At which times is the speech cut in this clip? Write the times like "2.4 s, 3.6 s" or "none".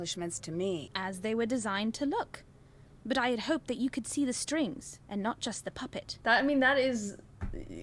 0.9 s, 6.1 s

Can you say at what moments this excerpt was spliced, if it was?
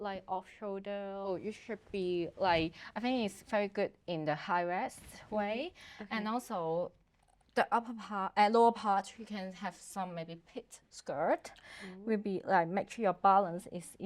1.3 s

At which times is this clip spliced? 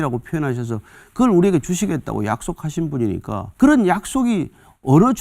3.4 s

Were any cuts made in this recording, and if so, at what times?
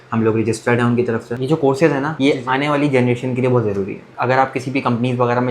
1.3 s, 2.1 s, 4.0 s

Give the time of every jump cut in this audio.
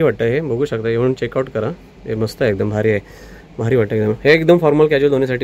none

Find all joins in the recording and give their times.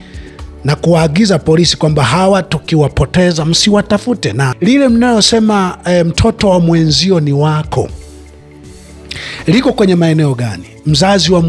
4.5 s

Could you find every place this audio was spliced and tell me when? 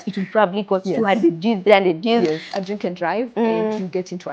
2.5 s

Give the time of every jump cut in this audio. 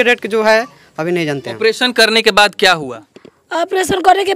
1.6 s

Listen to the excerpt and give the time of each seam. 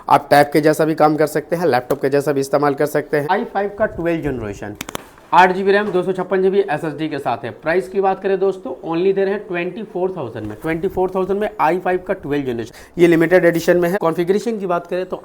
3.3 s, 12.7 s, 14.0 s

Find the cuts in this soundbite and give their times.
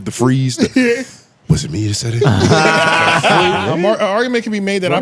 3.6 s

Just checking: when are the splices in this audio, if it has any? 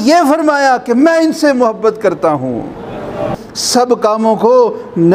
3.3 s

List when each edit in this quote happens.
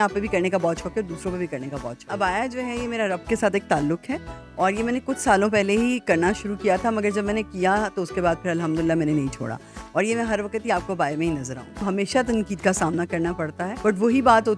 2.0 s, 11.8 s, 13.7 s

